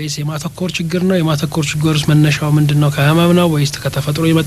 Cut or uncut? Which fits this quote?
uncut